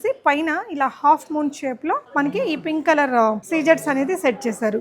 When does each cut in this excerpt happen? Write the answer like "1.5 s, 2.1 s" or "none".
2.1 s, 3.4 s